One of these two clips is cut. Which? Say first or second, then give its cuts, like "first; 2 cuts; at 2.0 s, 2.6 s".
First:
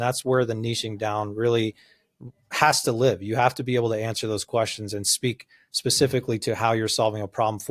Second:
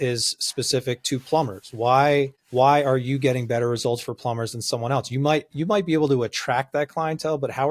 second; 1 cut; at 2.4 s